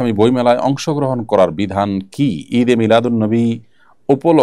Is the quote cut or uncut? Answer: uncut